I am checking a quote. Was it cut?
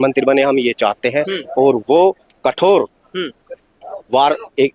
no; 0 cuts

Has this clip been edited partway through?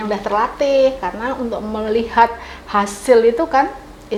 no; 0 cuts

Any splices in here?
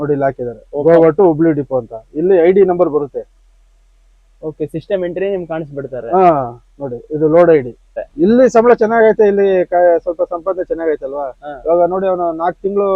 yes; 1 cut; at 8.1 s

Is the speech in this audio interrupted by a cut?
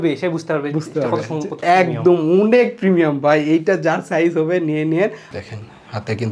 yes; 1 cut; at 5.3 s

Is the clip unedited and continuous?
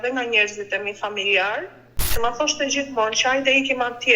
no; 1 cut; at 2.1 s

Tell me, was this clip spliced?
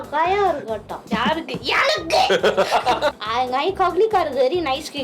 yes; 2 cuts; at 1.1 s, 3.2 s

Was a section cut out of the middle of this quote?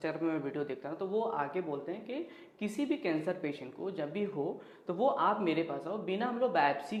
no; 0 cuts

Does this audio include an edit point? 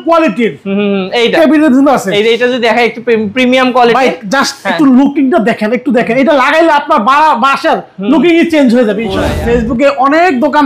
yes; 1 cut; at 9.3 s

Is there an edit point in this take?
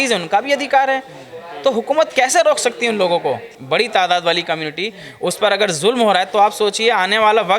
yes; 1 cut; at 3.5 s

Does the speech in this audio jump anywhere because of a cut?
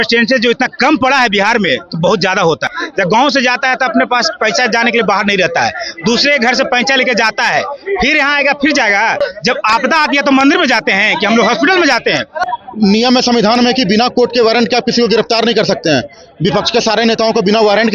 yes; 3 cuts; at 2.8 s, 9.2 s, 12.4 s

